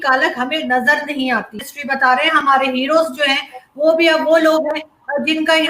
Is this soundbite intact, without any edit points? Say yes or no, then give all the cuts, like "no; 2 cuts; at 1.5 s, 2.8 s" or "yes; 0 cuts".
no; 1 cut; at 1.7 s